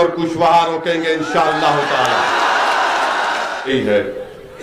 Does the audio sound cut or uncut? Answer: cut